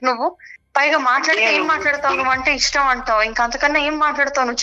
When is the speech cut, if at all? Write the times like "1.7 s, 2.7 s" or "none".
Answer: none